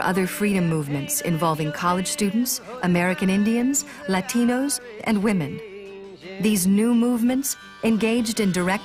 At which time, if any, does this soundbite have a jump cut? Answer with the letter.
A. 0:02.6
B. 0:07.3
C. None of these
A